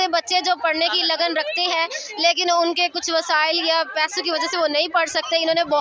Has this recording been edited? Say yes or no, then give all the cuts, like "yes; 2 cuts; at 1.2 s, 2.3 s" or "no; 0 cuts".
no; 0 cuts